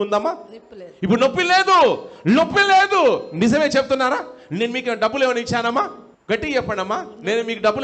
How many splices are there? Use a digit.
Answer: 1